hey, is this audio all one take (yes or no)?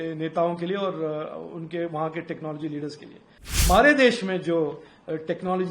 no